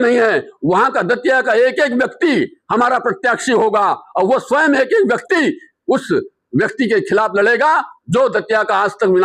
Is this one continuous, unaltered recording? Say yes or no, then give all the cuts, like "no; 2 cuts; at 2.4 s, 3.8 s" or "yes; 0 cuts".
yes; 0 cuts